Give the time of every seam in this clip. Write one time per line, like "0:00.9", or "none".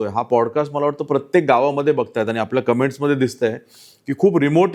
none